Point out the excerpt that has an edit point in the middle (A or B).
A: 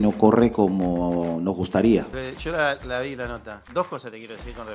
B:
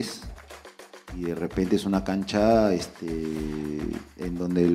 A